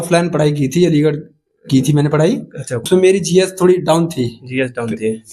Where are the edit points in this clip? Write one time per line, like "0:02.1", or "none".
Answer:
0:02.7